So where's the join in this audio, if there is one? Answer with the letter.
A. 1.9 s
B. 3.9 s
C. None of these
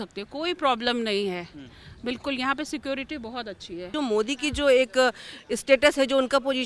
B